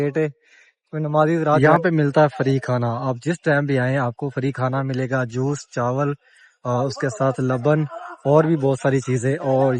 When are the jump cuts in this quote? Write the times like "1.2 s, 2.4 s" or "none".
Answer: 1.6 s